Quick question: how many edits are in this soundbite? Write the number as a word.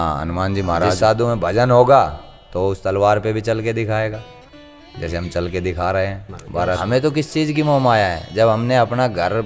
two